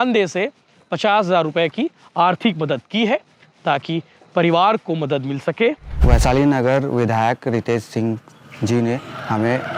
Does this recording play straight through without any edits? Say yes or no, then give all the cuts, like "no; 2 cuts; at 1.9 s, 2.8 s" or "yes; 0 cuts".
no; 1 cut; at 6.0 s